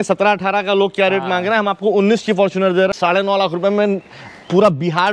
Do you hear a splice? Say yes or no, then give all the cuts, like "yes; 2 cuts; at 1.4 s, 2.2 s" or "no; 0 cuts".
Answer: yes; 1 cut; at 2.9 s